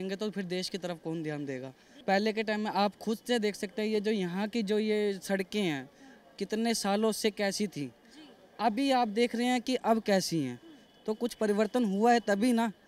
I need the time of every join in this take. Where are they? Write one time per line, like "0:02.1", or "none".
none